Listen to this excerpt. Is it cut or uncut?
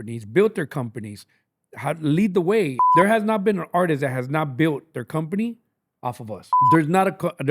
cut